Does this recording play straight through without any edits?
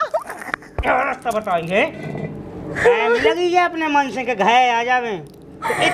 no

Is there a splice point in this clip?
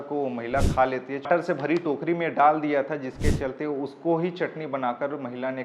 yes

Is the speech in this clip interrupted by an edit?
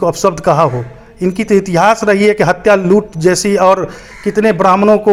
no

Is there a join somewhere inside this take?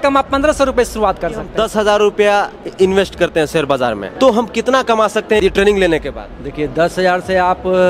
yes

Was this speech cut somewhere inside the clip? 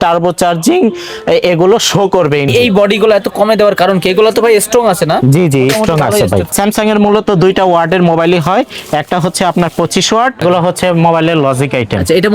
yes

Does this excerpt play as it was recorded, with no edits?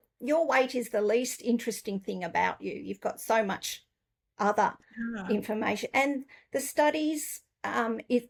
yes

